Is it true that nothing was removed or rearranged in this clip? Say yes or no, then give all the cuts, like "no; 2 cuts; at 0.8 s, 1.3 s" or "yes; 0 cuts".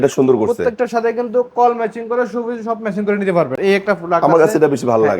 no; 1 cut; at 3.6 s